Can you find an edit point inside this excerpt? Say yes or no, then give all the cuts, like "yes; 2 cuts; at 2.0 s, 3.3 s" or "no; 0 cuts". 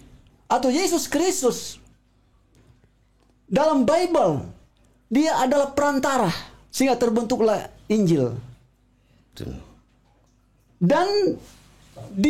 no; 0 cuts